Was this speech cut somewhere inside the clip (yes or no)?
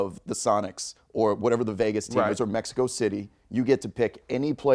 no